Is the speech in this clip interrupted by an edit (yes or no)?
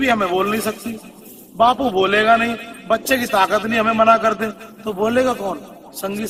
no